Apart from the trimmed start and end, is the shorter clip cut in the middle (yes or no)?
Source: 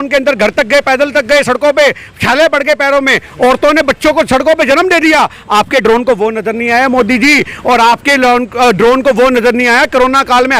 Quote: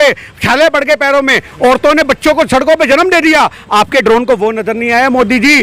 no